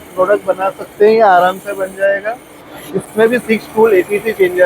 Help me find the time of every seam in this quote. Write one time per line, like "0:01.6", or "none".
0:03.1